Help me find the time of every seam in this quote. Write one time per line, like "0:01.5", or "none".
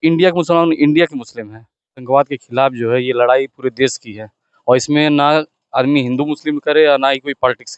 0:02.0